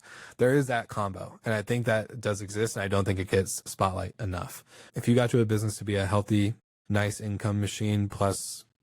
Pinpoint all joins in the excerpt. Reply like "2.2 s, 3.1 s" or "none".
3.6 s, 4.8 s, 6.7 s